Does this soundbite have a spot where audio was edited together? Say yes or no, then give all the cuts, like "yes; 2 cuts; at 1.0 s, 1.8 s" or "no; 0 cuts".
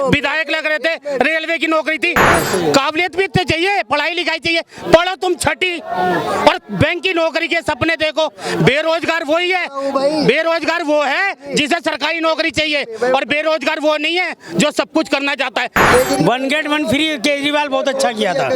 yes; 2 cuts; at 2.2 s, 15.8 s